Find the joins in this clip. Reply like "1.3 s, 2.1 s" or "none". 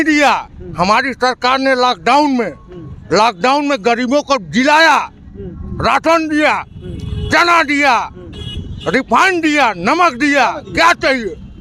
none